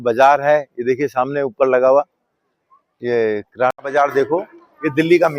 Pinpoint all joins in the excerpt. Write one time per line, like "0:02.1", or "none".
0:03.8